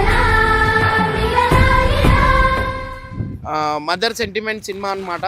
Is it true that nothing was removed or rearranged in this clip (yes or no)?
no